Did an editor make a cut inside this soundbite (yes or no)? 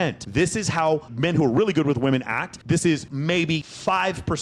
yes